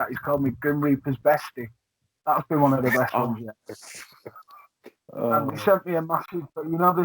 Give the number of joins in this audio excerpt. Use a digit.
1